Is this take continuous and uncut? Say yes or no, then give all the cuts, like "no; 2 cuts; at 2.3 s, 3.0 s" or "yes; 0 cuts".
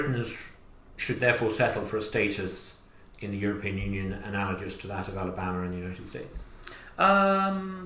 yes; 0 cuts